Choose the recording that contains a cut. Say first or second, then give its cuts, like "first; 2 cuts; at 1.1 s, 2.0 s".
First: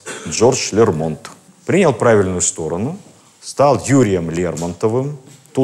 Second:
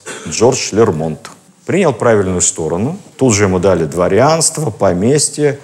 second; 1 cut; at 3.0 s